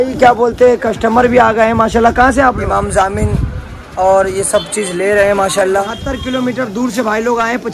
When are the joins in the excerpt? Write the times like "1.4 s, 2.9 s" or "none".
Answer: 2.6 s, 6.0 s